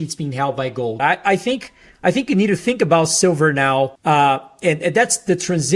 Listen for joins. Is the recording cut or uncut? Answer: cut